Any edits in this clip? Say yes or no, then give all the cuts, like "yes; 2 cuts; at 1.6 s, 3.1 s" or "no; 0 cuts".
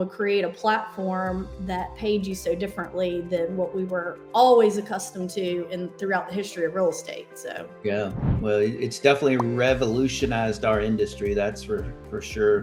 no; 0 cuts